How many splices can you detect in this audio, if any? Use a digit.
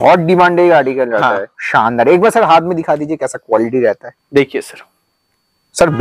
2